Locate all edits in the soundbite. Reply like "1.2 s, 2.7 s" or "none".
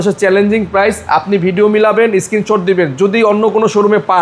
none